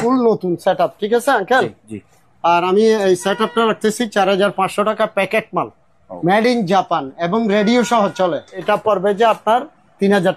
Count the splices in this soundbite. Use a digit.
1